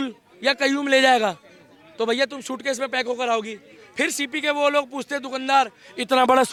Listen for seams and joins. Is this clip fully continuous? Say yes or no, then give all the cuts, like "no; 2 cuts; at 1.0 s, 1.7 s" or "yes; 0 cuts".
yes; 0 cuts